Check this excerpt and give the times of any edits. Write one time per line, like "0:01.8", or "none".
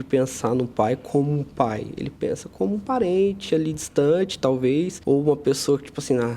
0:05.0